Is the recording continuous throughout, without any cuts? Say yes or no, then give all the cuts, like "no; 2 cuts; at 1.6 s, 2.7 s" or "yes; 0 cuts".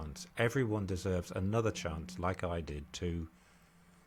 yes; 0 cuts